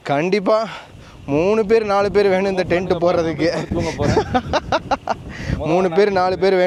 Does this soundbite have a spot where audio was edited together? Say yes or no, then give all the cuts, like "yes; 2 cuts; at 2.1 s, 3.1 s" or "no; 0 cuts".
no; 0 cuts